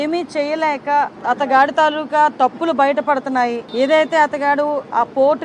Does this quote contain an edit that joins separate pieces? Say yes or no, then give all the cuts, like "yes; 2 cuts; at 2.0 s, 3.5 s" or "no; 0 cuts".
yes; 2 cuts; at 1.2 s, 3.6 s